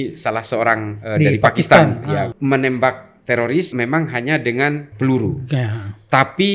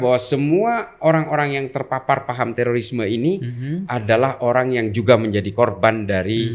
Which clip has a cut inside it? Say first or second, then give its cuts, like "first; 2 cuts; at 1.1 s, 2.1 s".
first; 3 cuts; at 2.3 s, 3.7 s, 4.9 s